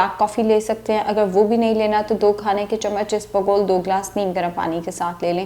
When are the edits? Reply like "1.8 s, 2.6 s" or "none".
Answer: none